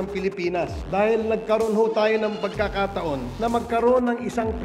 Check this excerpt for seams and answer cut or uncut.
uncut